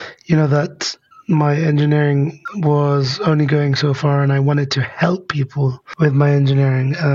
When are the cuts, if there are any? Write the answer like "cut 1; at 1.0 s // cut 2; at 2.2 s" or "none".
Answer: none